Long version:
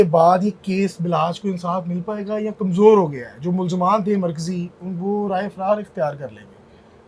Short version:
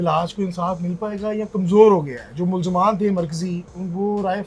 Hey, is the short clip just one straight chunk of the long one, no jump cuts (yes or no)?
yes